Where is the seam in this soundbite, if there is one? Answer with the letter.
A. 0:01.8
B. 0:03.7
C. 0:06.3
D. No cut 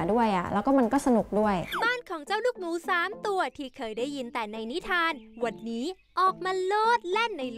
A